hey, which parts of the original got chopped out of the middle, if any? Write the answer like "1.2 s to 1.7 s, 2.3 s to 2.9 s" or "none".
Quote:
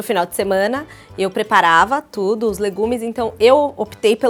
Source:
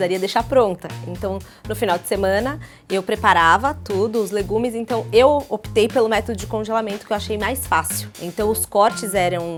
none